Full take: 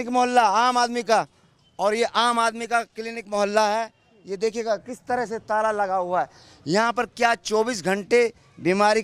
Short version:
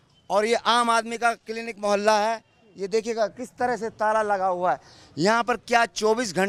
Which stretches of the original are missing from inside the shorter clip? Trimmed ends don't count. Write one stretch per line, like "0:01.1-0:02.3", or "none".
none